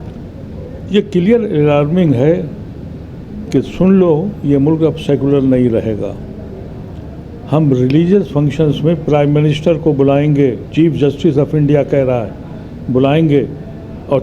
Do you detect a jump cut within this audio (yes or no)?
no